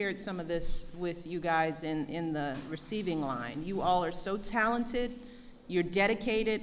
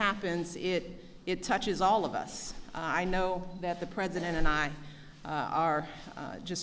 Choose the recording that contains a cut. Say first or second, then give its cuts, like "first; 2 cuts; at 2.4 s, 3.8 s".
second; 1 cut; at 4.4 s